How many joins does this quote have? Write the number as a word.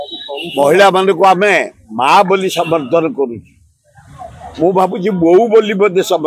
zero